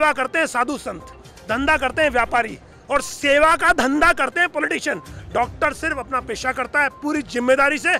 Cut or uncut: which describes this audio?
uncut